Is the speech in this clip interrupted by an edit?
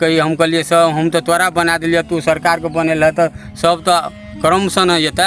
no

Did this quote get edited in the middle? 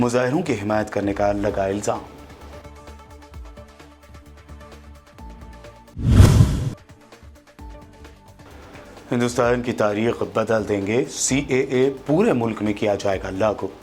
no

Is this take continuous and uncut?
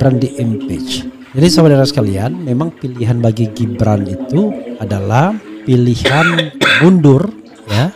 no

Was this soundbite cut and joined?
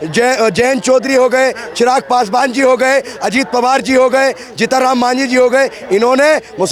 no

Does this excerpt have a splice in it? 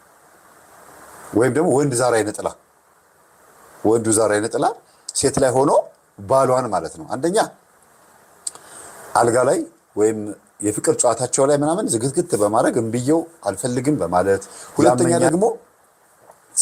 yes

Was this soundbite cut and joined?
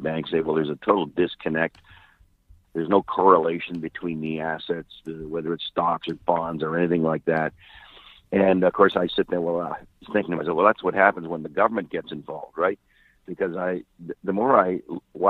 yes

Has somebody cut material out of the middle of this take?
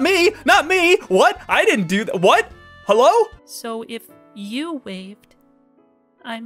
yes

